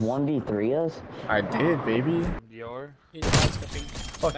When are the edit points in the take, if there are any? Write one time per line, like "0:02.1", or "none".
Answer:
0:02.4